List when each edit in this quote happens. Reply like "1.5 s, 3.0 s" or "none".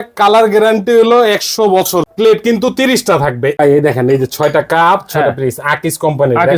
2.1 s, 3.5 s